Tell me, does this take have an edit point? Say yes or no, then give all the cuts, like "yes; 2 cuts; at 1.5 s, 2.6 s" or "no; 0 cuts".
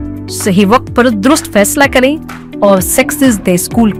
no; 0 cuts